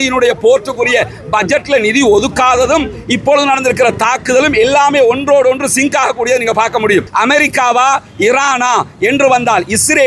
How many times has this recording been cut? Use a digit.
1